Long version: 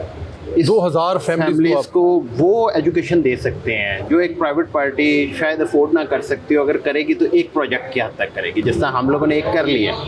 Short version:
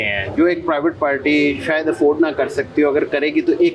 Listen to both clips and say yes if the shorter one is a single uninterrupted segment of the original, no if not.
yes